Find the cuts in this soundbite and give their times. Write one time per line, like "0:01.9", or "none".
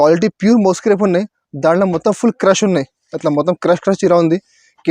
none